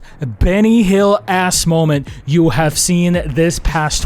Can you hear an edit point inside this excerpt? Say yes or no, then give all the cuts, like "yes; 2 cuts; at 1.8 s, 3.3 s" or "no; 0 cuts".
no; 0 cuts